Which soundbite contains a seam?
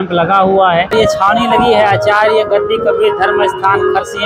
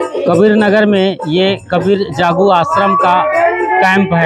first; 1 cut; at 0.9 s

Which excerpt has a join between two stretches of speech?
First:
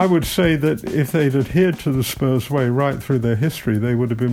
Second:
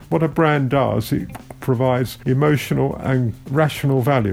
second; 2 cuts; at 2.2 s, 3.4 s

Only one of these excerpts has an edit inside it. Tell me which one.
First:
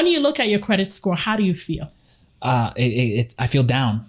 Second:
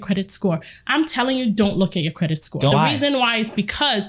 second; 1 cut; at 2.7 s

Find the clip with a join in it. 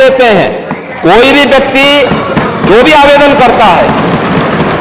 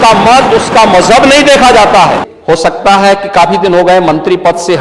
second; 1 cut; at 2.3 s

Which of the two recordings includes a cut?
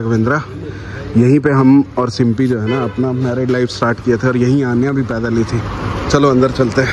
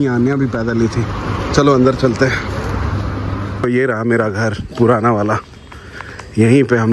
second; 1 cut; at 3.6 s

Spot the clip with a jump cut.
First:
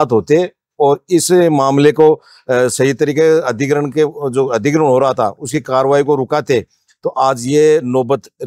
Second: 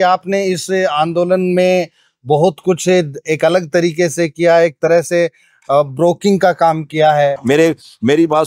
second; 1 cut; at 7.4 s

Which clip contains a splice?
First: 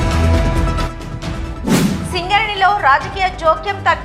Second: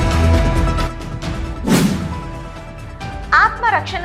first; 1 cut; at 2.0 s

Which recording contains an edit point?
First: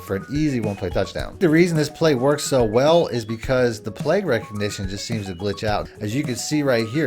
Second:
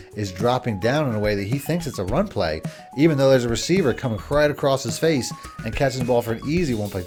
first; 2 cuts; at 1.4 s, 5.9 s

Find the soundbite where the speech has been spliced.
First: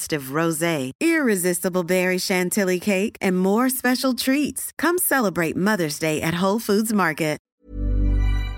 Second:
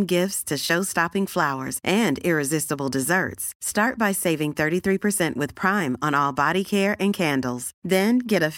first; 1 cut; at 7.4 s

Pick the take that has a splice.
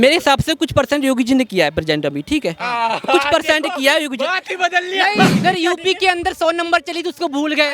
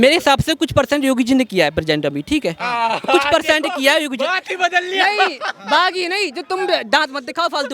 first; 1 cut; at 5.4 s

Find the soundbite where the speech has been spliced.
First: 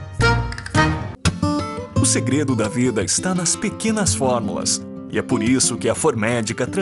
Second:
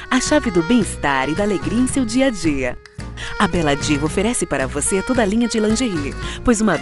first; 1 cut; at 1.1 s

